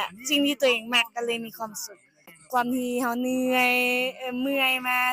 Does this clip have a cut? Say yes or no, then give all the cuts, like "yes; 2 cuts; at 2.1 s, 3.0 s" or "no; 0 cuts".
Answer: yes; 1 cut; at 2.3 s